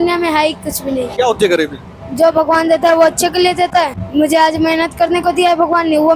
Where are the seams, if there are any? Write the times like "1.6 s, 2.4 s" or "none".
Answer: 1.1 s, 4.0 s